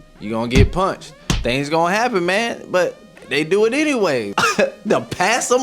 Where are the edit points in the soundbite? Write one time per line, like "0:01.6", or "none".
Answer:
0:04.3